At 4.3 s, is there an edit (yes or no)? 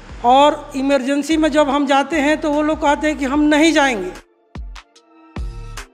yes